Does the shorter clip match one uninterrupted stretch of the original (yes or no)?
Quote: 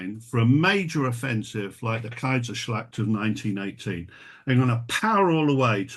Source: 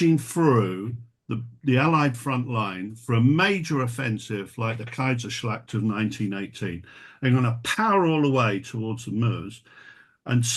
yes